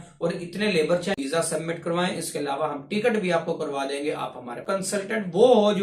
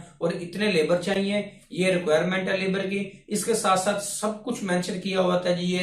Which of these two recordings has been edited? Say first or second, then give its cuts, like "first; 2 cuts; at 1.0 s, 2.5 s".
first; 2 cuts; at 1.1 s, 4.6 s